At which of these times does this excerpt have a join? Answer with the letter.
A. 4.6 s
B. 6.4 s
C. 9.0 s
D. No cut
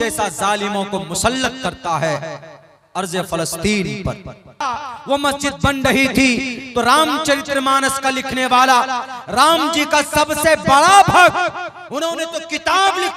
A